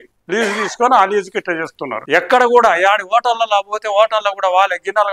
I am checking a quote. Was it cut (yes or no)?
yes